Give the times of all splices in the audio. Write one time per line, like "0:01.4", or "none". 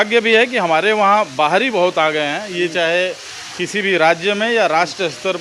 none